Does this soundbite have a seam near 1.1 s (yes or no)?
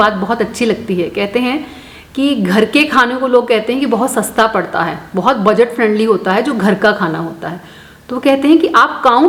no